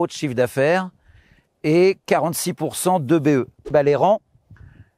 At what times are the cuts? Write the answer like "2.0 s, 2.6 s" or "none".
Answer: 3.7 s